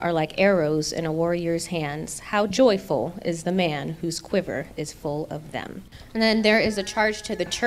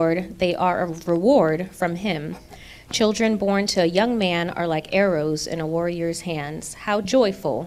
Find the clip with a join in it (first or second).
first